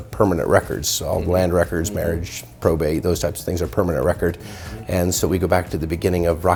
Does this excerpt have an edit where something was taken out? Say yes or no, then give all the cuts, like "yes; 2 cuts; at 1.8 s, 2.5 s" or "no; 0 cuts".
no; 0 cuts